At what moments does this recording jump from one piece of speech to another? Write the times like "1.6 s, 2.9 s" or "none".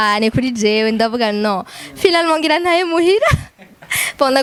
none